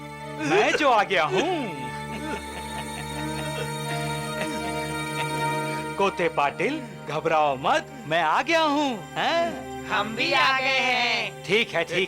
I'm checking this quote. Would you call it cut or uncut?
uncut